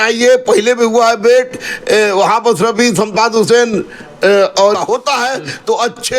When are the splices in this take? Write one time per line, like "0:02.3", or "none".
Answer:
0:04.8